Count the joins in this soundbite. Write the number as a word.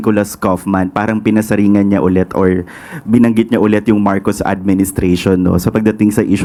zero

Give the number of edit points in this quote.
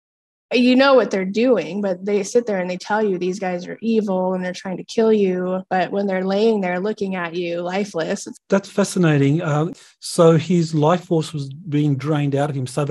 two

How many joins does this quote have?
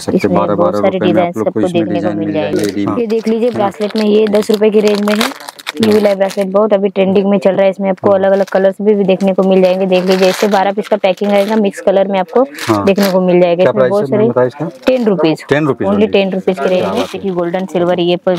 two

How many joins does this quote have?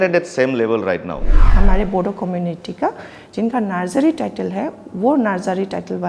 one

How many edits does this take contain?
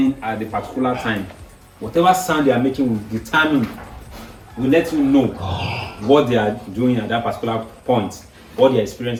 zero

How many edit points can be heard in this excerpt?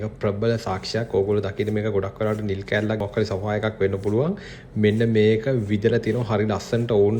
one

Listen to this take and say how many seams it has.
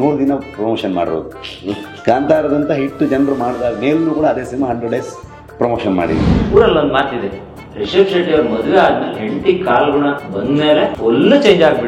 two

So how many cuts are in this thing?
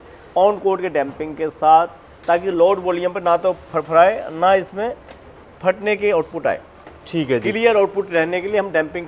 zero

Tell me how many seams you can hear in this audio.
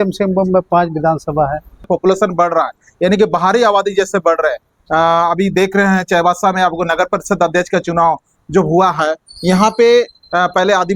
one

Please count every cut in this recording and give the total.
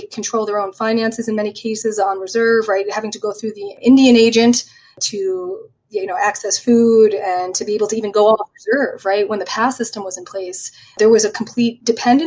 two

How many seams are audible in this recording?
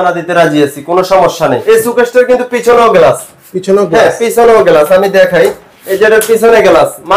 one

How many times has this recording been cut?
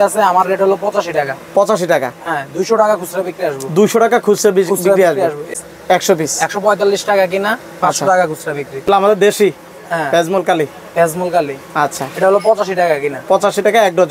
two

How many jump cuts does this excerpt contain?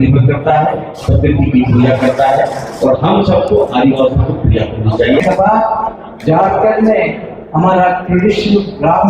one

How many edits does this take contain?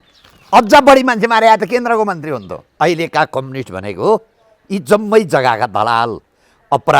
one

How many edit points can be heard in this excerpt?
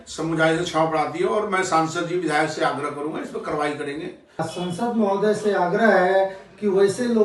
one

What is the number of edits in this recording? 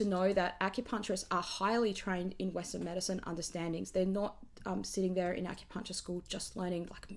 zero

